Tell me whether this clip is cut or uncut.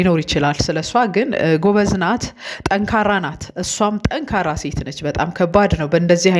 uncut